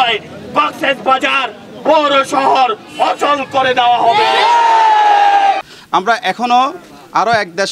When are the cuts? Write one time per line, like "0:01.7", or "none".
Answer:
0:05.6